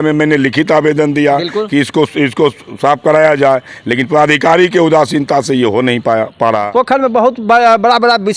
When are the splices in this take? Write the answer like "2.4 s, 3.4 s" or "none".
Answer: 6.7 s